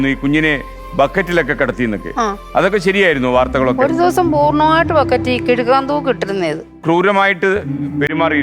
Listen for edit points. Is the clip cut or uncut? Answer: cut